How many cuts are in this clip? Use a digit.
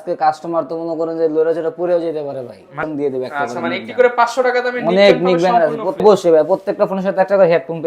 2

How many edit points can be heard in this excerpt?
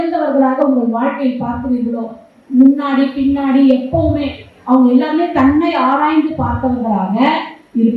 0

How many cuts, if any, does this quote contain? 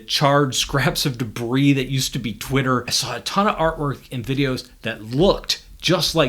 1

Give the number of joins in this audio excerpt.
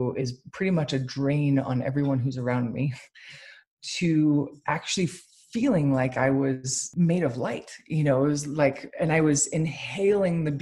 1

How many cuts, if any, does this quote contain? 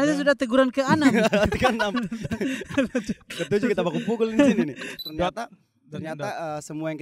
1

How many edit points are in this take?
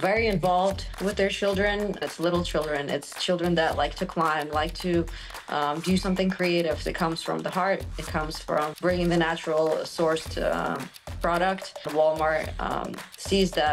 4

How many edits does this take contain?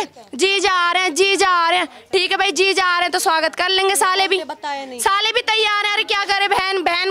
0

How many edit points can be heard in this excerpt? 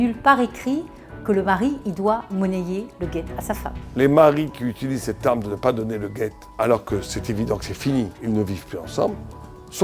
3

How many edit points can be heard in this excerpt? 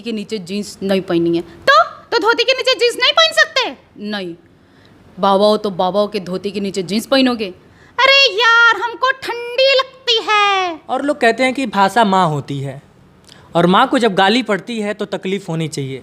1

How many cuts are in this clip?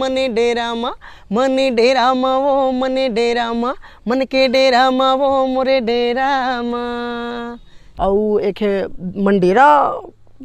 1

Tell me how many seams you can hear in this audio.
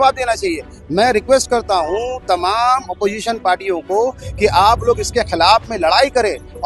0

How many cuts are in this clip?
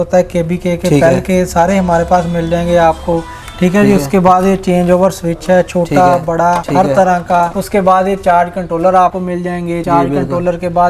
0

